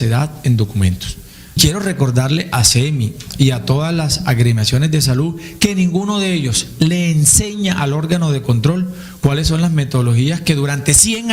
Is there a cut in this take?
yes; 1 cut; at 1.6 s

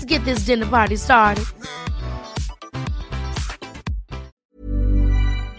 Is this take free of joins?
no; 1 cut; at 4.3 s

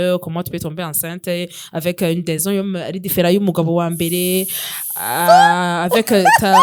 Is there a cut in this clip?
no; 0 cuts

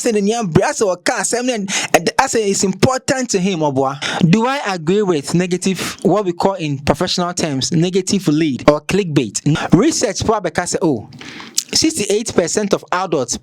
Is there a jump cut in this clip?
yes; 3 cuts; at 4.0 s, 8.6 s, 9.5 s

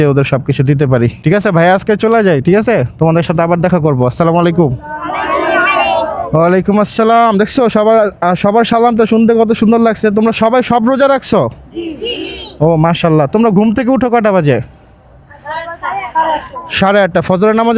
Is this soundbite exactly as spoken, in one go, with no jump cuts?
yes; 0 cuts

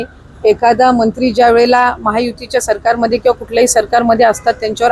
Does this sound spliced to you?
no; 0 cuts

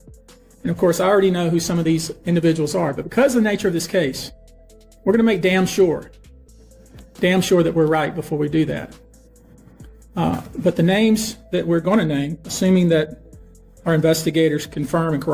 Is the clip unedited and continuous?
yes; 0 cuts

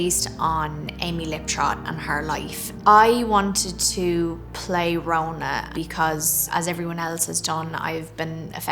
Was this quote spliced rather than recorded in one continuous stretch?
yes; 1 cut; at 2.7 s

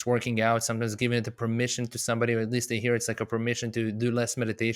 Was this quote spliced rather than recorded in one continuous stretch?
no; 0 cuts

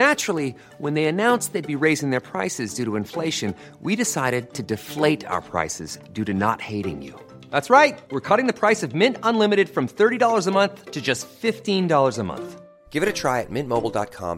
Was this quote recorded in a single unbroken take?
yes; 0 cuts

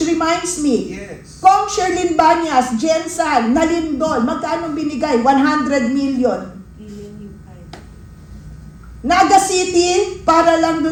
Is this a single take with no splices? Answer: yes; 0 cuts

